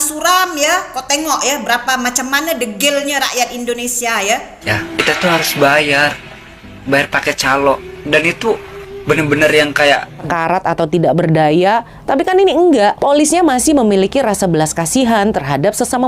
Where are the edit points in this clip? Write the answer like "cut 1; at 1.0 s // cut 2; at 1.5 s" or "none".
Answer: cut 1; at 4.7 s // cut 2; at 10.2 s